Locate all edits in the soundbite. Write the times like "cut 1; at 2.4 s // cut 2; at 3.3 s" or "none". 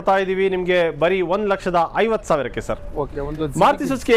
none